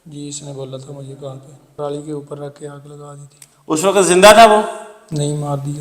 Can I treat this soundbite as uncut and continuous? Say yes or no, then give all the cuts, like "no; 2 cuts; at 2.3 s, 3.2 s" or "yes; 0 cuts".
no; 1 cut; at 1.8 s